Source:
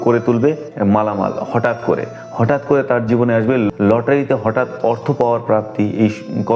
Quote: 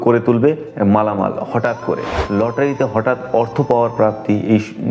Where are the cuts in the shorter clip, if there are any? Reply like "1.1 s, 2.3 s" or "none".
2.3 s